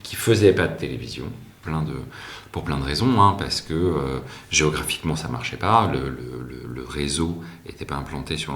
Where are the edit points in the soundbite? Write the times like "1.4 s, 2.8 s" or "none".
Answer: 1.6 s